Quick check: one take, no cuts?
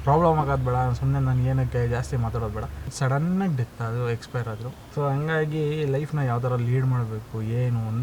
no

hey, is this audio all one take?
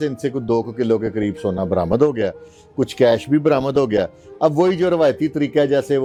yes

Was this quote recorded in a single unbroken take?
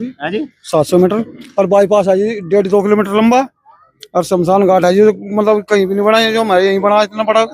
yes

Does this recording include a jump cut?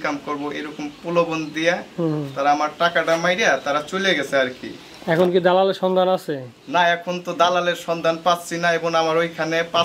no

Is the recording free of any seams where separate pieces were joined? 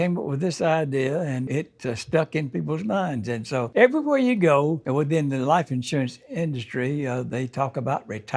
no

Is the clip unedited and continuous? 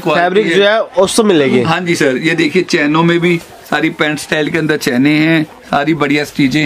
yes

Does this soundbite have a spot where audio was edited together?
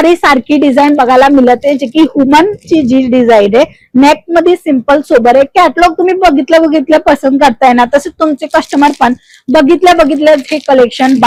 no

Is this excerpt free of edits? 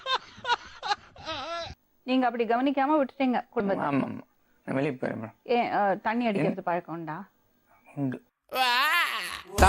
no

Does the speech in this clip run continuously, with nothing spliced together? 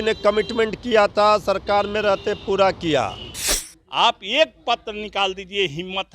no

